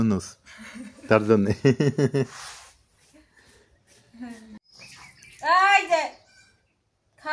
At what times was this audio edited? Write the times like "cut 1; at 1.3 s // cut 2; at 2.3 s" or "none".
cut 1; at 4.6 s